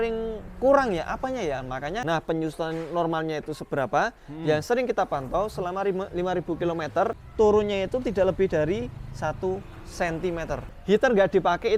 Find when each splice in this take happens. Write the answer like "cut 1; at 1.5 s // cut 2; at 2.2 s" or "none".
cut 1; at 2.0 s // cut 2; at 7.2 s // cut 3; at 10.7 s